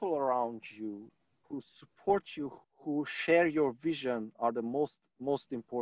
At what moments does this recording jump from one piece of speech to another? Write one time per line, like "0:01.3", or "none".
0:01.1
0:02.6